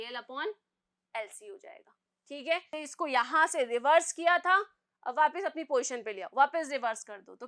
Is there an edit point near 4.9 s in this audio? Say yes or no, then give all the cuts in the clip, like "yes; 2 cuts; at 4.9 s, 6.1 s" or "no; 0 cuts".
no; 1 cut; at 2.7 s